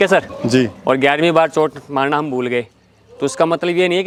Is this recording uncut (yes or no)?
yes